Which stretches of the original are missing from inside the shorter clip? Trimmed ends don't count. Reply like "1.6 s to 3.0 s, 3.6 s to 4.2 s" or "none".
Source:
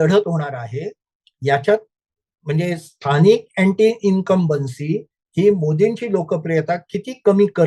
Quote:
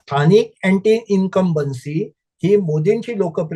none